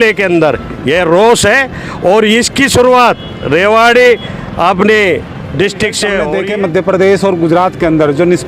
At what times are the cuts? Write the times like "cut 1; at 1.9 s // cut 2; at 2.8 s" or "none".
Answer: cut 1; at 6.3 s